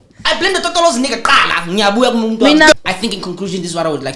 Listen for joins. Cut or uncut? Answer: cut